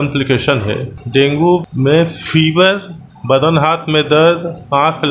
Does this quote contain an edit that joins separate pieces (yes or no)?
yes